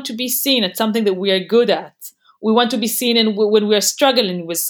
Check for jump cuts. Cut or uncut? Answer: uncut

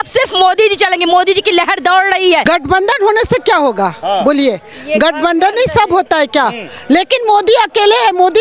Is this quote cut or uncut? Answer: cut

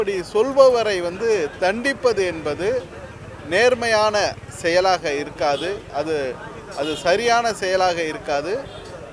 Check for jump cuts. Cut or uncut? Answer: uncut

